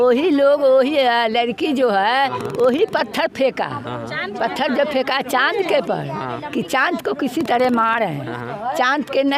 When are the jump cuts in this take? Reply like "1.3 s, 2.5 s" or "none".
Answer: none